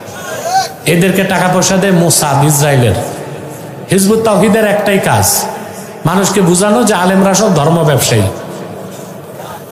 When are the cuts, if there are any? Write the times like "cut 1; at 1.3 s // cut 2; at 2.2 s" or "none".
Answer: none